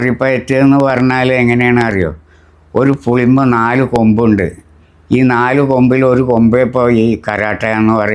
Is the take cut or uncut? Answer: uncut